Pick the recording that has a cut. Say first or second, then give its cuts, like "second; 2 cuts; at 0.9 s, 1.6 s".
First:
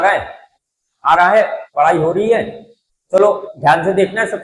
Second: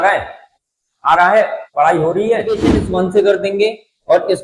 second; 1 cut; at 2.7 s